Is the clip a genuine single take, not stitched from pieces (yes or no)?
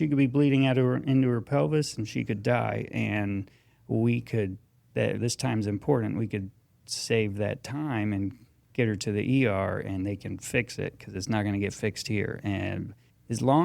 yes